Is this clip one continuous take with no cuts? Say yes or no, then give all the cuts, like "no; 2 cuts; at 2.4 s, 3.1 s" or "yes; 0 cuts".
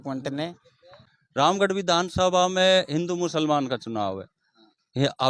no; 1 cut; at 1.1 s